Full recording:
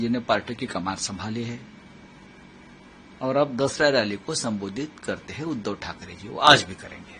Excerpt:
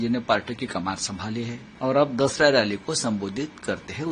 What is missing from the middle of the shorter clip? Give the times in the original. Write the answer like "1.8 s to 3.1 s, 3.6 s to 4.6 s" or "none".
1.6 s to 3.0 s